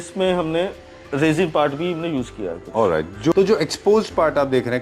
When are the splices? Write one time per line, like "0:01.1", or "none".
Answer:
0:03.3

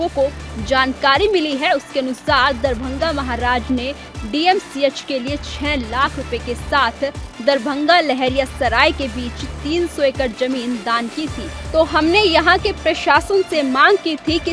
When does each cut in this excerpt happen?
none

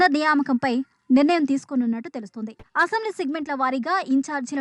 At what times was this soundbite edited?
0:02.6

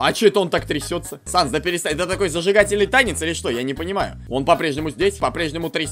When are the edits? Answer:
0:01.2
0:04.2
0:05.2

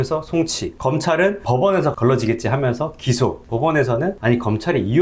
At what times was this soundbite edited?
0:01.0
0:03.4
0:04.2

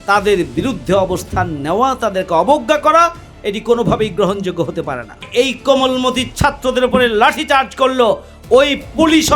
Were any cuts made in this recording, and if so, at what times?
0:05.3

